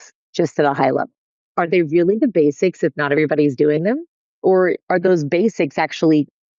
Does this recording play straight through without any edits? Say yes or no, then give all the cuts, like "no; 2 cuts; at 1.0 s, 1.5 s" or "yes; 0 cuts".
no; 2 cuts; at 1.5 s, 4.8 s